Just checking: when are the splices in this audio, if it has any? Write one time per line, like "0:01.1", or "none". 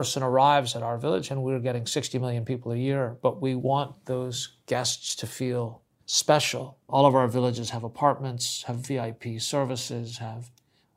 0:06.9

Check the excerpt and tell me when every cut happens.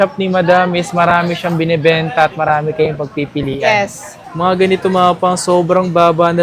0:04.2

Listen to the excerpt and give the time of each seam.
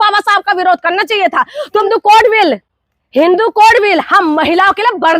0:01.8

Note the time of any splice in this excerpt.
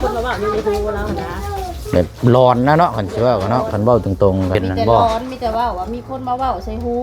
0:04.6

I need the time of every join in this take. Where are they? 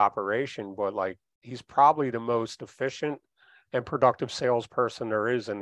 none

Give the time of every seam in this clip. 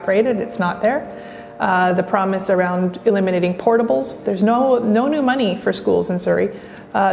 none

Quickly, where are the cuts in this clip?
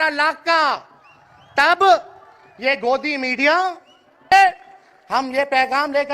0:04.3

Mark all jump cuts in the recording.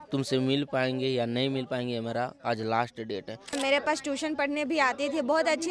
0:03.5

